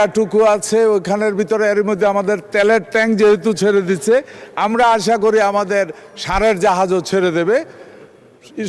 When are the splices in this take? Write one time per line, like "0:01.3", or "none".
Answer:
none